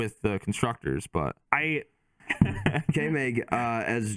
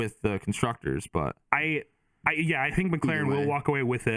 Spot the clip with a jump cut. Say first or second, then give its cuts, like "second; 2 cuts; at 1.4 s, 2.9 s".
first; 1 cut; at 2.1 s